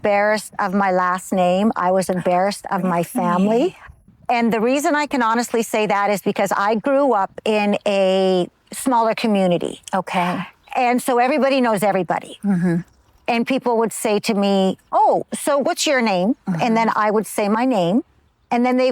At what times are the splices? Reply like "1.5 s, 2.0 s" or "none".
4.1 s